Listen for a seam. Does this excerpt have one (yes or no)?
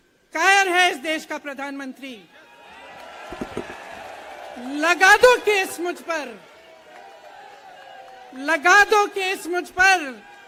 no